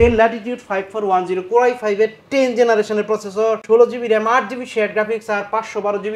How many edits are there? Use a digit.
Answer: 1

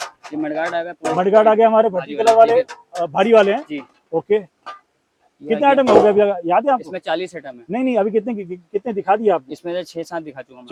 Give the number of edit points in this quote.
0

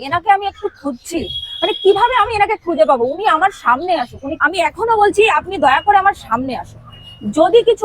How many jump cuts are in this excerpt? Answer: 1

